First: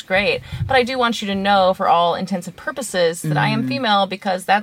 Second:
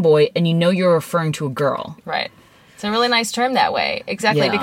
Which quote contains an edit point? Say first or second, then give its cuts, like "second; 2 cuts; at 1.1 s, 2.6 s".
second; 1 cut; at 1.9 s